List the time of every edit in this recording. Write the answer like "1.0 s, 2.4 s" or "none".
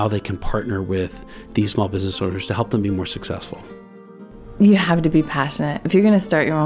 4.2 s

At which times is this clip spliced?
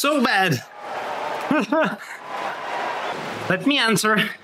3.1 s

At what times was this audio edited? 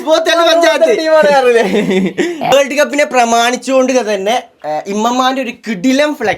2.5 s

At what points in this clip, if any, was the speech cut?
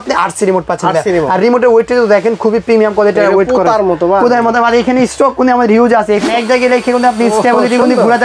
6.2 s

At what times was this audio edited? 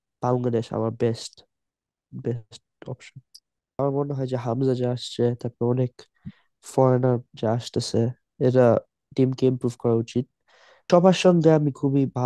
3.8 s, 10.8 s

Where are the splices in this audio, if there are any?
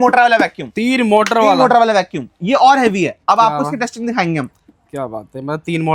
none

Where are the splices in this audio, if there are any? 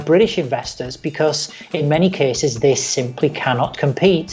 none

